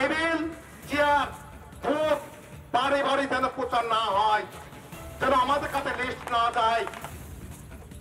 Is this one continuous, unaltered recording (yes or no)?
no